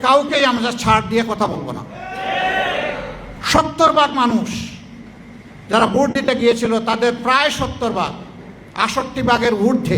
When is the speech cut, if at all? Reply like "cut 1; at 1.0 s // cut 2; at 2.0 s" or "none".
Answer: cut 1; at 3.3 s